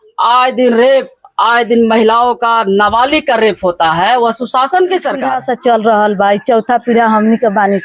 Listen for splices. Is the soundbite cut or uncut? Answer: cut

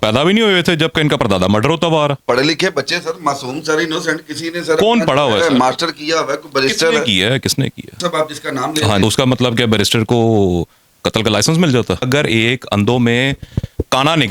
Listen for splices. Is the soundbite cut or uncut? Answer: cut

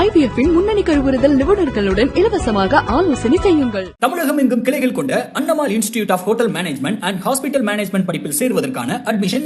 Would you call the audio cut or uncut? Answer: uncut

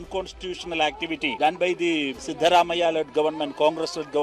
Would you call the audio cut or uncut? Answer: cut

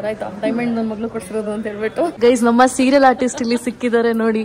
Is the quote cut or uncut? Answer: cut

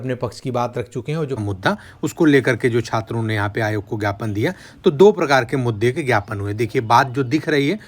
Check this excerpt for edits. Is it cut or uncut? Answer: cut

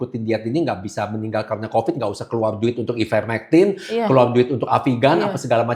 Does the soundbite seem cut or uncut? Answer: uncut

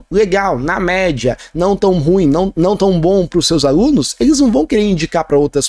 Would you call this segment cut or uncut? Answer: uncut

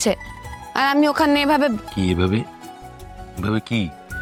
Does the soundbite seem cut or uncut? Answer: uncut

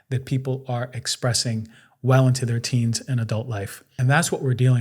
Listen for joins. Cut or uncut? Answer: cut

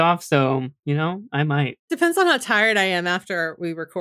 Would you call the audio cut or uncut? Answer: cut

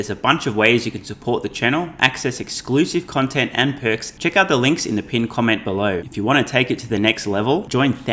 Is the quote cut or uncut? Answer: cut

